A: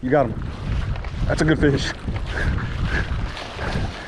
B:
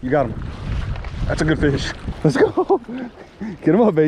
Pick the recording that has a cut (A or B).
B